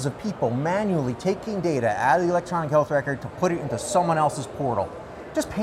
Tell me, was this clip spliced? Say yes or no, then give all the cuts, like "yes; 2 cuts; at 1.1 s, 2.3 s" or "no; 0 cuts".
no; 0 cuts